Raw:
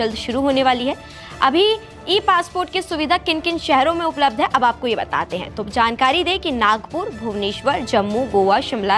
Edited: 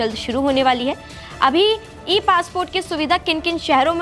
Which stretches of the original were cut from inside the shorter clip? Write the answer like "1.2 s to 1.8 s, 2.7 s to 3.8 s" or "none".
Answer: none